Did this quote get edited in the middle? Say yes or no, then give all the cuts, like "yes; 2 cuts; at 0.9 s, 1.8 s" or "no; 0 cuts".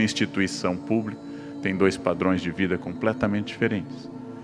no; 0 cuts